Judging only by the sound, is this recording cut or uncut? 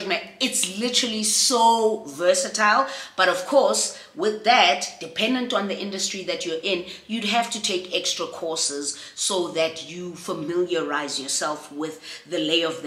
uncut